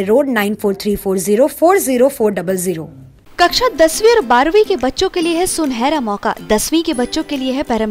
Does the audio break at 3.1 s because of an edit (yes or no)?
no